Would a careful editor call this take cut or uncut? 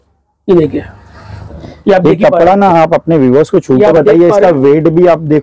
uncut